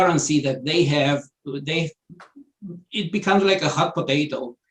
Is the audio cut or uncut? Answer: uncut